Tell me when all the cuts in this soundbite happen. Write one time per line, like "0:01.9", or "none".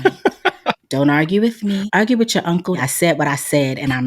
0:01.9
0:02.8